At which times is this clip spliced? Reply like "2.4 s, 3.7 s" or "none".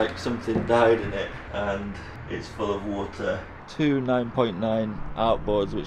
1.4 s, 2.1 s, 3.6 s